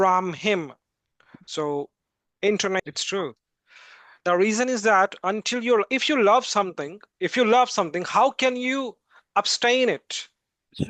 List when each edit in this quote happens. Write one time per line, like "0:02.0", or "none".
0:02.8

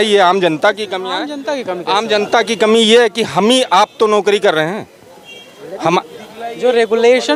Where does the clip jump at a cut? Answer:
none

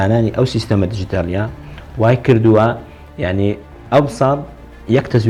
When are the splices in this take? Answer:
none

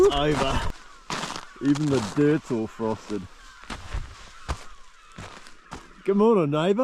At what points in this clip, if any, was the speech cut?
none

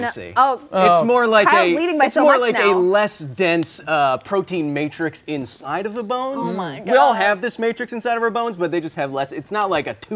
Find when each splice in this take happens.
none

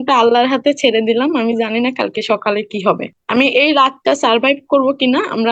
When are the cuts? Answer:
0:03.1

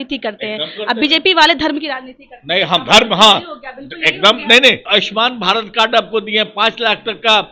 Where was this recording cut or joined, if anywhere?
0:04.8

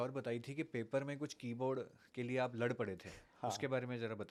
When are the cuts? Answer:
none

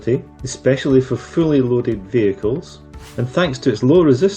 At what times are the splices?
0:02.9

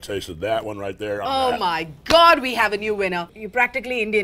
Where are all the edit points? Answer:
0:01.2
0:03.4

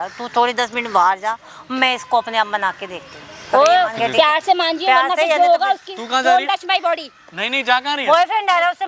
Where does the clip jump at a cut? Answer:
none

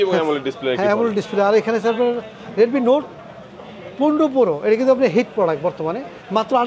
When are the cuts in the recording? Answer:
none

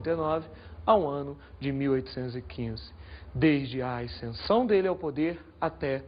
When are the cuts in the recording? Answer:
0:03.9

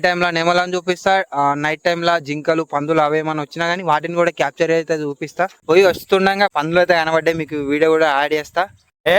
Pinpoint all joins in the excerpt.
0:05.6
0:06.5

